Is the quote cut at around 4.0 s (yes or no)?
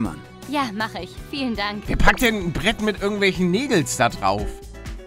no